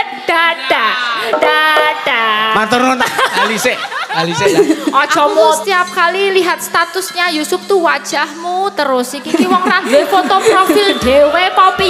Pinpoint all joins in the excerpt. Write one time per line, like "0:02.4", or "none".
0:05.6

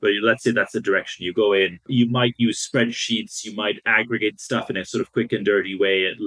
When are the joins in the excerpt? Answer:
0:01.8

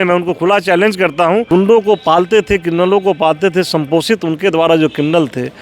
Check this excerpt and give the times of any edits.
0:01.5

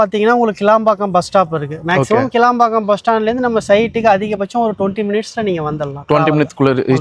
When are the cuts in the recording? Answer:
none

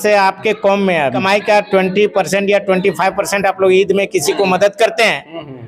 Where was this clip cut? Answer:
0:01.2

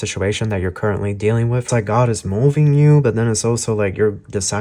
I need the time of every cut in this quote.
0:01.7

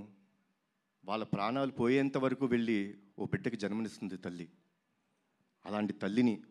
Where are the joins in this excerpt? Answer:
none

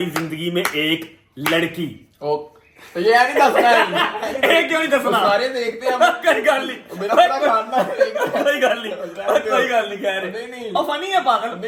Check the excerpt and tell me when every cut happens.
none

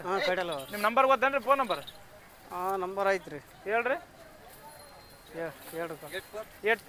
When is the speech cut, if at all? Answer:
none

